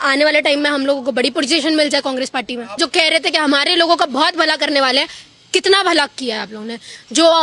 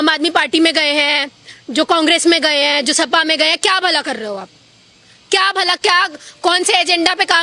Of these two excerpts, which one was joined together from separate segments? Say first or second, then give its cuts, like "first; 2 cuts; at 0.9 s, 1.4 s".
first; 1 cut; at 2.8 s